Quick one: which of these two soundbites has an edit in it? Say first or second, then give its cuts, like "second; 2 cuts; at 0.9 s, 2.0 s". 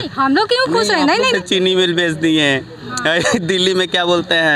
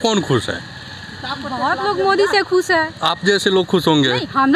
first; 1 cut; at 1.3 s